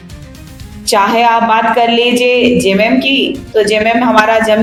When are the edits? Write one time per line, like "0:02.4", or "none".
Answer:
none